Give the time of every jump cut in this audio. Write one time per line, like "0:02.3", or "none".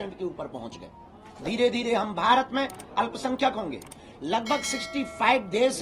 none